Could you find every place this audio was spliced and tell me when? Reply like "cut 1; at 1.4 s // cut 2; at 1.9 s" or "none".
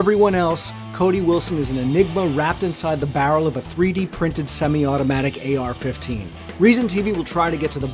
cut 1; at 3.5 s